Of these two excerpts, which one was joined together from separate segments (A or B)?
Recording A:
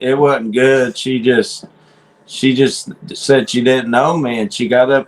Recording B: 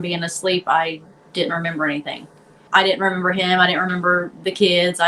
B